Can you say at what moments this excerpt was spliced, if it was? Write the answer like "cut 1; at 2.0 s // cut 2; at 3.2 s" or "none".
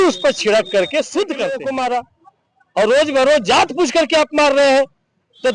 cut 1; at 1.8 s